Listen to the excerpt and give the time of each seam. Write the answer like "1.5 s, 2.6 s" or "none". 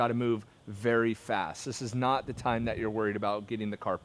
none

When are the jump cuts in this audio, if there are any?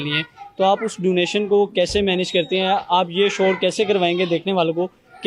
none

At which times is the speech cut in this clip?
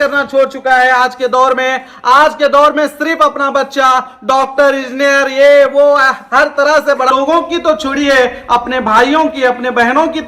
7.1 s

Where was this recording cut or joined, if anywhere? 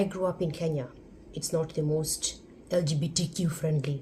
none

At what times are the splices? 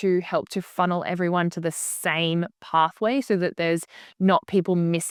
none

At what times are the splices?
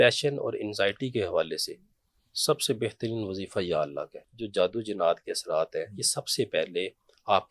4.3 s

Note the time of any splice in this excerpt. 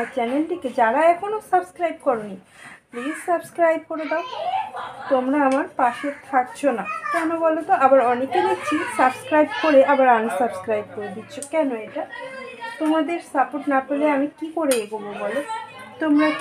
none

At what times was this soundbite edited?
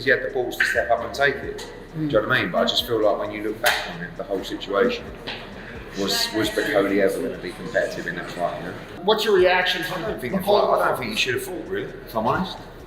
8.9 s

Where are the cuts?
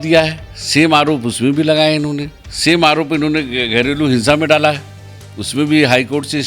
none

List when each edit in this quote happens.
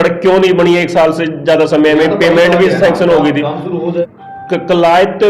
4.1 s

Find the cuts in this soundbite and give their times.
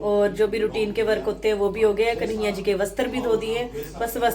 none

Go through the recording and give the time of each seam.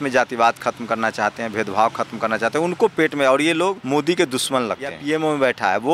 3.8 s, 5.0 s

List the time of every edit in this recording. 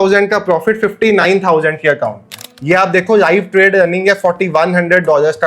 2.5 s

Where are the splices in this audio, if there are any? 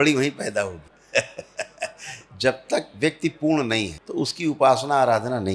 0.9 s, 4.0 s

